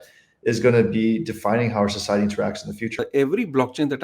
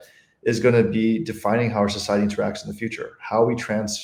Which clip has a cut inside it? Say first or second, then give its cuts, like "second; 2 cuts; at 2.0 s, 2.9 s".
first; 1 cut; at 3.0 s